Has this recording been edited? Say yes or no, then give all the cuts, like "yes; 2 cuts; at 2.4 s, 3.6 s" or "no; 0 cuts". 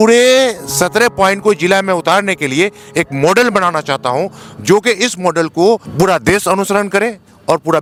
no; 0 cuts